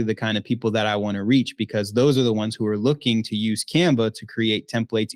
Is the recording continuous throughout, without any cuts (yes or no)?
yes